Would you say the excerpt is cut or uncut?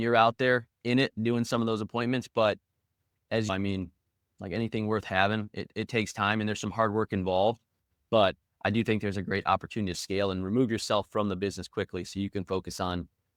uncut